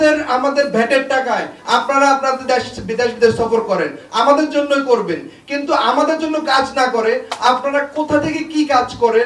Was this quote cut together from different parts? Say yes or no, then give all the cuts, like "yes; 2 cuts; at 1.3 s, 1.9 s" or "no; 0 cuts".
no; 0 cuts